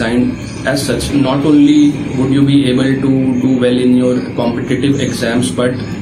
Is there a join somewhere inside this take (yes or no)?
yes